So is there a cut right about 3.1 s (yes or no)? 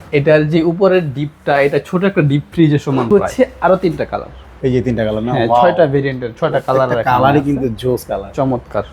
yes